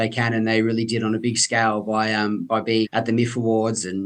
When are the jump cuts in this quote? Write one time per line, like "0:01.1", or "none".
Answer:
0:02.9